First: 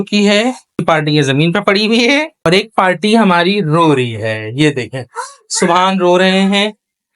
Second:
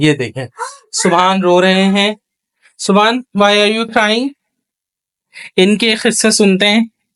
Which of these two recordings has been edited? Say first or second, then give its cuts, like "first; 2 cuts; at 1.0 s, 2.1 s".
first; 2 cuts; at 0.8 s, 2.5 s